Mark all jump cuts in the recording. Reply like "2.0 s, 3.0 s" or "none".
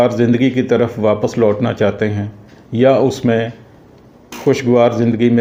none